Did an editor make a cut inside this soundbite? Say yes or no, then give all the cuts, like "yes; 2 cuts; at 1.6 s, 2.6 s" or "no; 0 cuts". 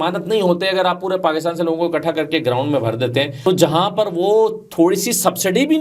yes; 1 cut; at 3.4 s